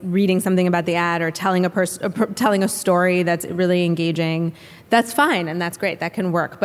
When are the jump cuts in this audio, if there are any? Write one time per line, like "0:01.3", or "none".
none